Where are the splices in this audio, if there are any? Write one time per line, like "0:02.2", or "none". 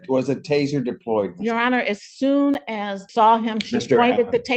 0:03.0